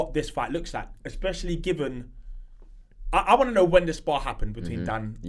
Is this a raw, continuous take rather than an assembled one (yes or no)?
yes